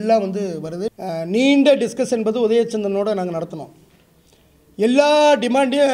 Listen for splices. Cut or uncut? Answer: cut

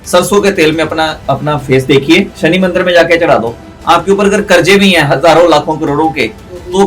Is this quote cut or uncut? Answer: cut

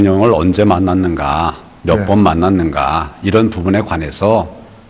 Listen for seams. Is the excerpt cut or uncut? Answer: uncut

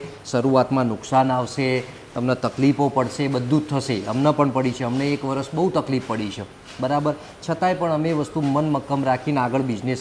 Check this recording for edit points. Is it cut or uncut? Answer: uncut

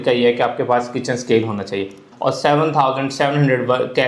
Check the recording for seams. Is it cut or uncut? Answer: cut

